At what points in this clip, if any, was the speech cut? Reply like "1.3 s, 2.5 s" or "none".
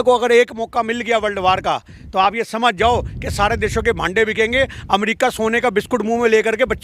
none